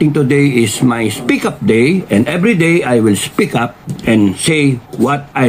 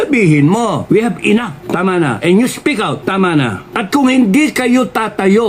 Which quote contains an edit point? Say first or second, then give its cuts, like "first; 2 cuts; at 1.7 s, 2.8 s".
second; 4 cuts; at 0.8 s, 1.6 s, 3.0 s, 3.7 s